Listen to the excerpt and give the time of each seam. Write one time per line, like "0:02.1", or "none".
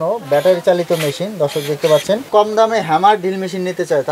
0:02.3